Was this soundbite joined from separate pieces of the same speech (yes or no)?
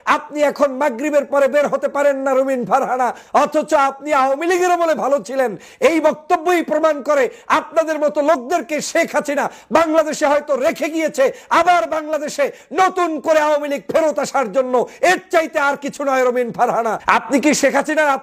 yes